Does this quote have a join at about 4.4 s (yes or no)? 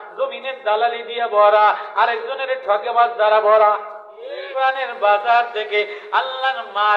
yes